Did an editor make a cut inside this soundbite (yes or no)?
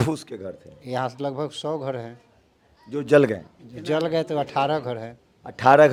no